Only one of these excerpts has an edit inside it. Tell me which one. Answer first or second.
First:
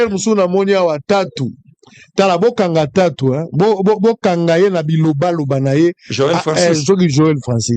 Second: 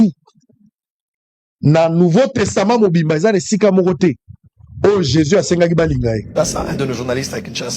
second